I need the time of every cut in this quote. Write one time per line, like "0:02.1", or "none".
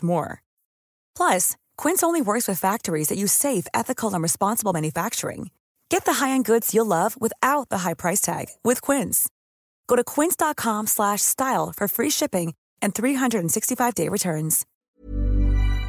0:14.7